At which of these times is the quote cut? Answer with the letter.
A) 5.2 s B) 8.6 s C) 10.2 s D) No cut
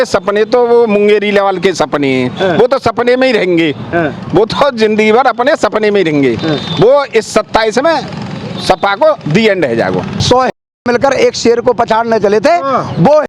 C